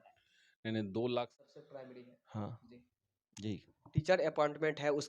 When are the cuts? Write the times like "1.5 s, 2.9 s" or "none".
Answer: 1.3 s